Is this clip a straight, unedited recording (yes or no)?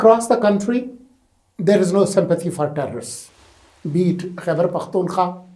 yes